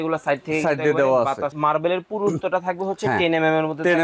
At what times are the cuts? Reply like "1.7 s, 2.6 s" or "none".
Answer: 1.5 s